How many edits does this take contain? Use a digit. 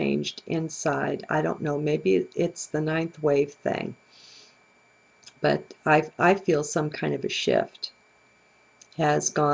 0